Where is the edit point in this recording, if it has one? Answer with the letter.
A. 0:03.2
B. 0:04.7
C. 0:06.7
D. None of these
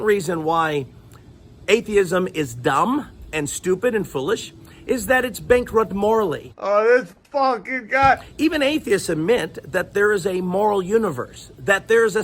D